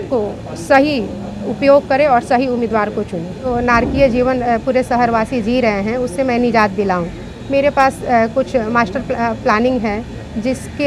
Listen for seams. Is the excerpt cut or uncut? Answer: cut